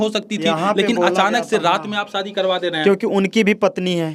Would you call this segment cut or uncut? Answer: uncut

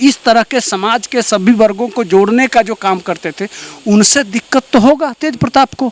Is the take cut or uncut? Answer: uncut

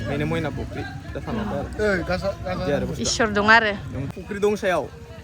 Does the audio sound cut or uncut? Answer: cut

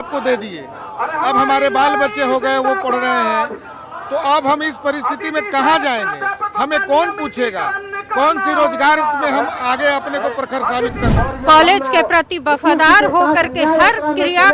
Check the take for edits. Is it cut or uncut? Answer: cut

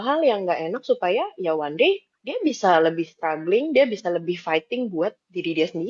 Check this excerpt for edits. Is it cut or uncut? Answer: uncut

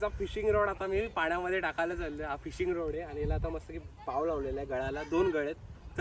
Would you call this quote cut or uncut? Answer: uncut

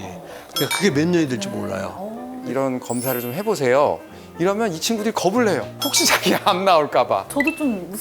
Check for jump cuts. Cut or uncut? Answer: cut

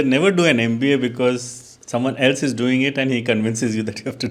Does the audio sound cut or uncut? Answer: uncut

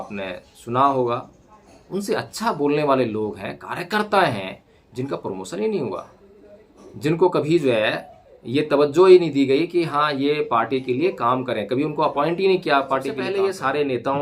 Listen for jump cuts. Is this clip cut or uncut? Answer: cut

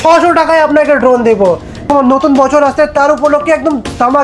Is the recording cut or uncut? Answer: cut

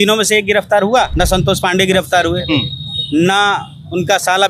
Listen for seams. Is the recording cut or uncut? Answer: cut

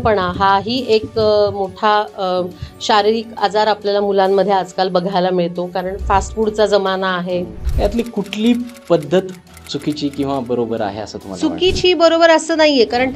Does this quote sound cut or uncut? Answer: cut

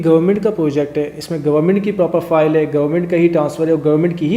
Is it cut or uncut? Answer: uncut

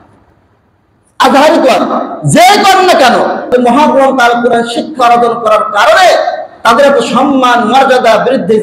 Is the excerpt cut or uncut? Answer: cut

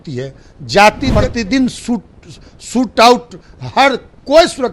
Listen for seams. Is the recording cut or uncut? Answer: cut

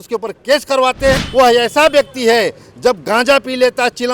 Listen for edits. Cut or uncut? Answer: cut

